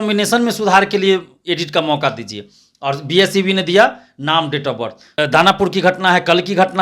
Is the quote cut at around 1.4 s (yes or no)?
no